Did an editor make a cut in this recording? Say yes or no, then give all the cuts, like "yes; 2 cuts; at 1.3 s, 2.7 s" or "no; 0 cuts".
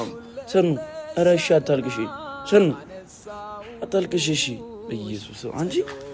no; 0 cuts